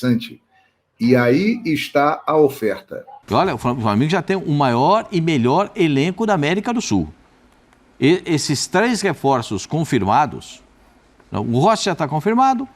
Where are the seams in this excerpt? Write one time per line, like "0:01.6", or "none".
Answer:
0:03.2